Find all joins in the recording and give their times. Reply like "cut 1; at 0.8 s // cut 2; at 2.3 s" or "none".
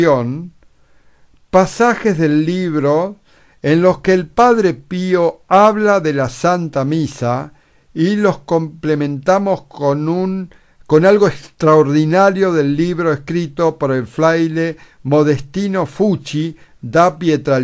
cut 1; at 1.4 s